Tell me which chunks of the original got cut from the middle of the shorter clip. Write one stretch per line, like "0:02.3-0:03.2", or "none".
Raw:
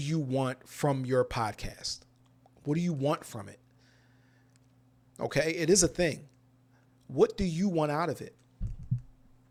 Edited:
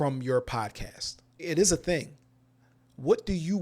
0:02.3-0:05.5